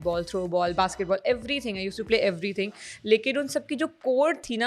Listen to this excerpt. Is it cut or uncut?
uncut